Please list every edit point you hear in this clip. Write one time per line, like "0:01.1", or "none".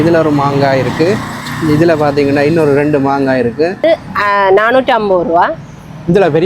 0:03.8

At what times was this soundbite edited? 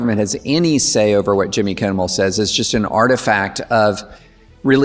none

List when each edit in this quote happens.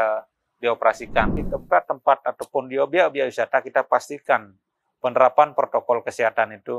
0:01.4

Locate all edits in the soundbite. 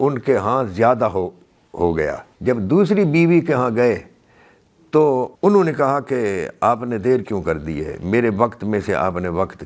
0:02.3
0:05.3

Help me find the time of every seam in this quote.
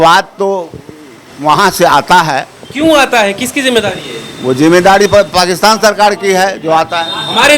none

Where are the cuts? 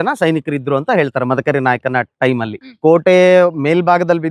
0:02.5

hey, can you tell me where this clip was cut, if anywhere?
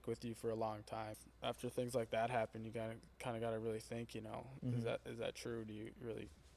0:01.2

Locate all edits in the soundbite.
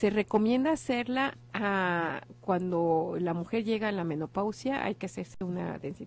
0:01.4

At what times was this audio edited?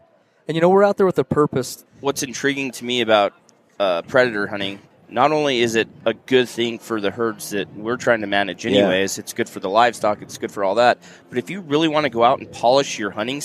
0:01.8
0:04.8

